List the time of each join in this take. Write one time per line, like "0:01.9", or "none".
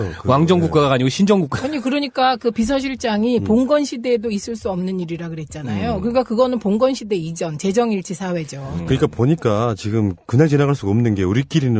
0:07.7